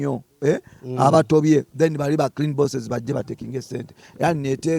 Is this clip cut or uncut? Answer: uncut